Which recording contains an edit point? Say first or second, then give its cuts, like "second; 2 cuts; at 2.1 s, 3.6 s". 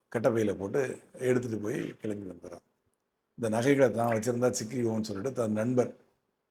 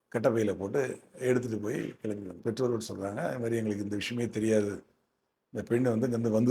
second; 1 cut; at 2.4 s